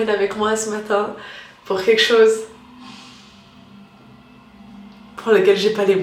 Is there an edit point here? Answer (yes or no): no